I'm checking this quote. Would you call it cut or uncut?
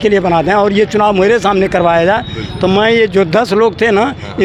uncut